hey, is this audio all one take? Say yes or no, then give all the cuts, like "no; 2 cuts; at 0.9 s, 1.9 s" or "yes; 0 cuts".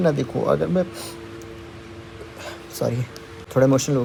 yes; 0 cuts